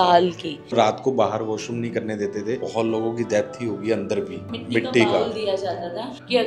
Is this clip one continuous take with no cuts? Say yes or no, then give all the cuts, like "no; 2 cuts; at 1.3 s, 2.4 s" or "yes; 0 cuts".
no; 3 cuts; at 0.7 s, 2.6 s, 4.5 s